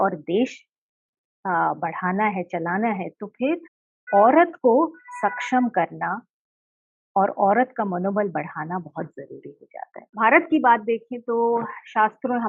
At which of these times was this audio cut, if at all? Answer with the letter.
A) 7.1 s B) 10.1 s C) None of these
B